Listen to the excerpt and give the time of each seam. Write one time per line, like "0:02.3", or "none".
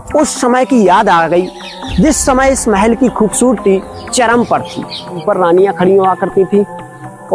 0:05.2